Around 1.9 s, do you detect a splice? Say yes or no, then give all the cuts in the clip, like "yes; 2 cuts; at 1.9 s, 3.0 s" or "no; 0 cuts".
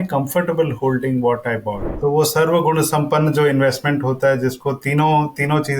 yes; 1 cut; at 1.9 s